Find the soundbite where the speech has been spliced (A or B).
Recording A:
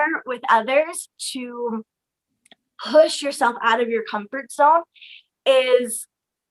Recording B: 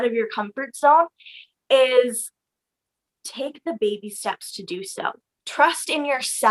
B